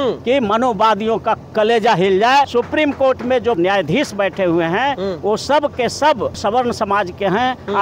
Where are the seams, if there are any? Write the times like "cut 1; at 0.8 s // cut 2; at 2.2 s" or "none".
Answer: cut 1; at 2.5 s // cut 2; at 3.6 s // cut 3; at 6.4 s

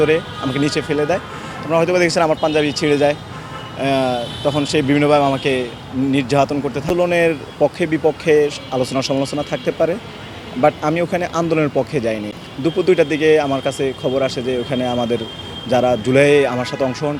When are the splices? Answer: cut 1; at 6.9 s // cut 2; at 12.3 s

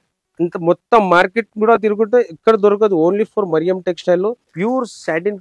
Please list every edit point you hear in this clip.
cut 1; at 4.5 s

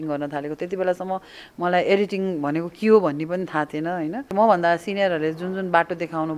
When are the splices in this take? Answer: cut 1; at 4.3 s

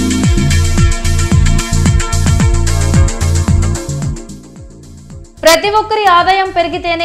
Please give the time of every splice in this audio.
none

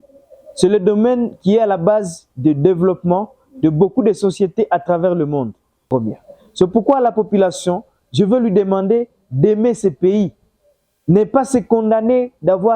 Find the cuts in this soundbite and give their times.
cut 1; at 5.8 s

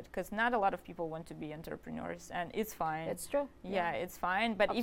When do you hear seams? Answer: none

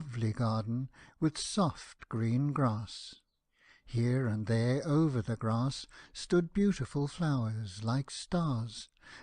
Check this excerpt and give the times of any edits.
cut 1; at 2.7 s

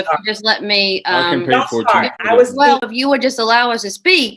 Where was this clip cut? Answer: cut 1; at 2.9 s

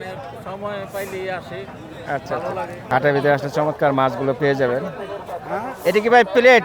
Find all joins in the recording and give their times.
cut 1; at 2.8 s

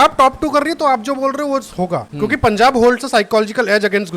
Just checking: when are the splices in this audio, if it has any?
cut 1; at 2.1 s

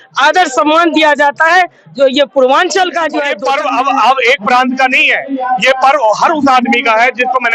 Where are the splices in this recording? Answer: cut 1; at 3.3 s

